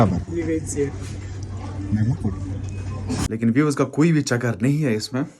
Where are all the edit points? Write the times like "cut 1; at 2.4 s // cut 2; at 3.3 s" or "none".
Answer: cut 1; at 3.2 s